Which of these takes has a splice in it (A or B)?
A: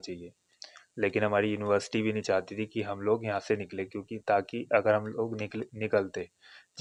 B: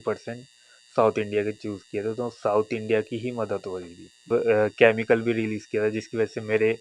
B